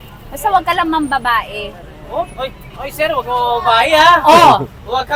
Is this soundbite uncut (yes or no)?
yes